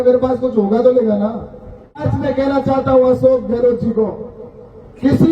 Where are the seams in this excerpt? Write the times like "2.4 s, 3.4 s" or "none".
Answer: 2.1 s